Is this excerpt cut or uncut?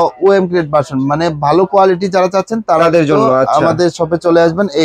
uncut